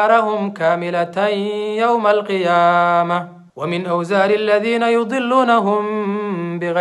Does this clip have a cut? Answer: yes; 1 cut; at 3.4 s

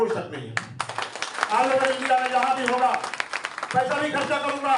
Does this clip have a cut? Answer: no; 0 cuts

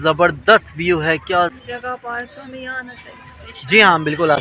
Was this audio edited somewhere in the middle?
yes; 1 cut; at 1.5 s

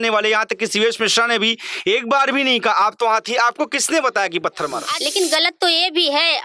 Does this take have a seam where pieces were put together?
yes; 1 cut; at 5.0 s

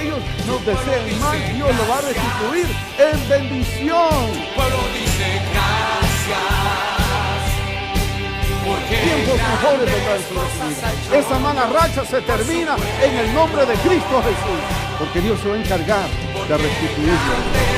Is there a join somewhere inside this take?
no; 0 cuts

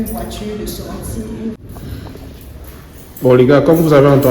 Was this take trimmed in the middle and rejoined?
yes; 1 cut; at 1.6 s

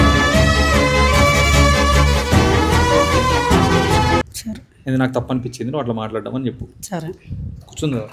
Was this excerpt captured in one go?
yes; 0 cuts

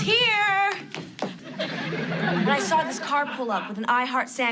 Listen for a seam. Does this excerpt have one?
yes; 1 cut; at 1.3 s

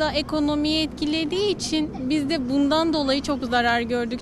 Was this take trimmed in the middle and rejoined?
no; 0 cuts

